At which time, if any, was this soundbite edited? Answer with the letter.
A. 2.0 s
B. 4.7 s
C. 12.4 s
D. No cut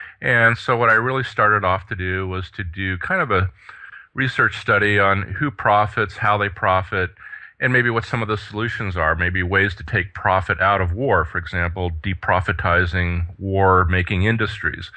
D